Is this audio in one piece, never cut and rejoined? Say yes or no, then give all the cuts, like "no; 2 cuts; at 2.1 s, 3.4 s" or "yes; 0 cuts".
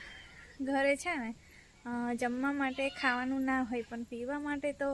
yes; 0 cuts